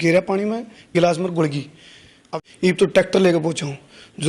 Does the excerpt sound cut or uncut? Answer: cut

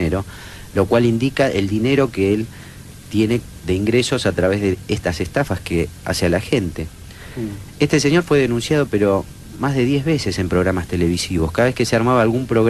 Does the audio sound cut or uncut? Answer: uncut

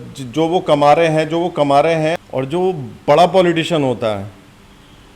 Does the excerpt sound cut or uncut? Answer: cut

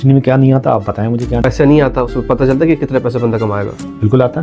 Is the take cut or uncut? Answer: uncut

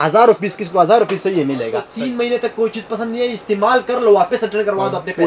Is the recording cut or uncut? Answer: cut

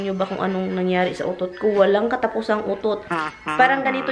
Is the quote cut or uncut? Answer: uncut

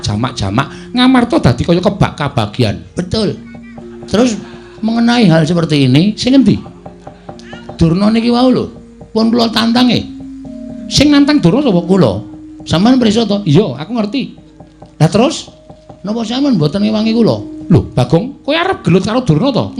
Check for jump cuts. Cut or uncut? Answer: uncut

